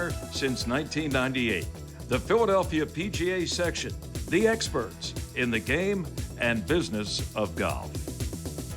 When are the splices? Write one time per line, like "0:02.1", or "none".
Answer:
0:07.8